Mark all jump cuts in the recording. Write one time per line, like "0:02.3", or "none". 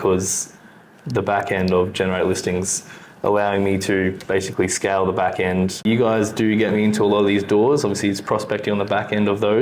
0:05.8